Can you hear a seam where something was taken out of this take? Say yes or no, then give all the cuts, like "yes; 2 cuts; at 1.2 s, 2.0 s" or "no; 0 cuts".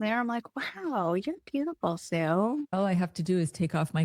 yes; 1 cut; at 2.7 s